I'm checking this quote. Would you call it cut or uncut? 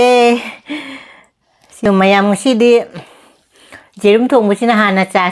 cut